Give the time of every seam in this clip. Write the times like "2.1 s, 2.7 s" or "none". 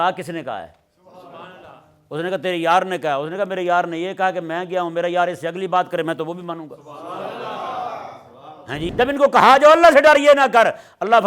8.9 s